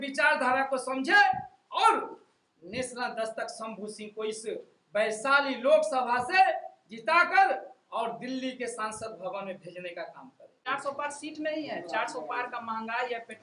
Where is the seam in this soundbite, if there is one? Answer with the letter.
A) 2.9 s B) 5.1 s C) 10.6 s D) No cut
C